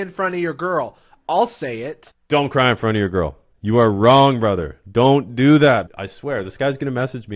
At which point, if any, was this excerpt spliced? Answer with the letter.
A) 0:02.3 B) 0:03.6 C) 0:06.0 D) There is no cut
C